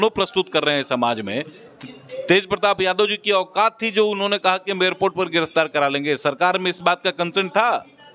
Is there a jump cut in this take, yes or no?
no